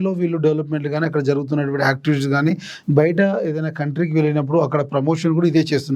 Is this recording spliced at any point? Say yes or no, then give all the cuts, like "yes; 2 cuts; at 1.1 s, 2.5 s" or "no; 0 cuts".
no; 0 cuts